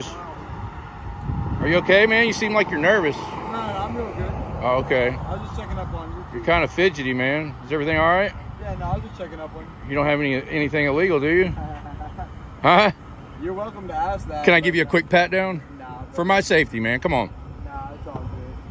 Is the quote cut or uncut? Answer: uncut